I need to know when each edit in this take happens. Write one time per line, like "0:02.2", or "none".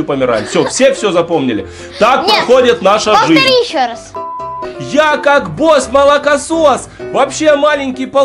0:04.2